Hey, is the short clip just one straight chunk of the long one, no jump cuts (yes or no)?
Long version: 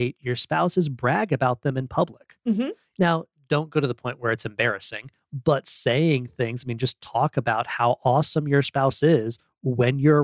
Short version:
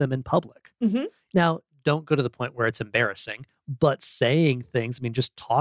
yes